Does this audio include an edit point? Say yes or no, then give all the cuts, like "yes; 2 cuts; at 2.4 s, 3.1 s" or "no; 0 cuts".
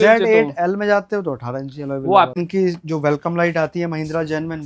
yes; 1 cut; at 2.4 s